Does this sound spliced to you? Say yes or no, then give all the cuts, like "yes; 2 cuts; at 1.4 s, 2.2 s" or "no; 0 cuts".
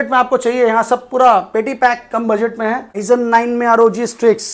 yes; 1 cut; at 2.9 s